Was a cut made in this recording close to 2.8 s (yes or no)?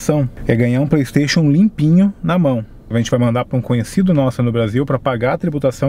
yes